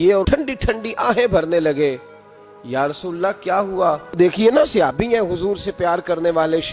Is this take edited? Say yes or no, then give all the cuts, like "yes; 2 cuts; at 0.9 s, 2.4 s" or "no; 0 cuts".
yes; 1 cut; at 4.2 s